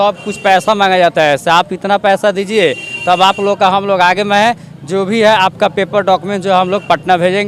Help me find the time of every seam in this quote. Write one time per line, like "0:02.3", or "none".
none